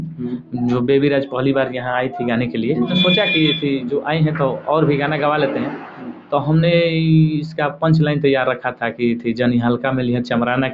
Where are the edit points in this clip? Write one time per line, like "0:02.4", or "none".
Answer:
0:02.9